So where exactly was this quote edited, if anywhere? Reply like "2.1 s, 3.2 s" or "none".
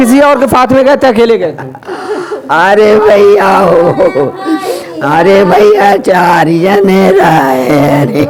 none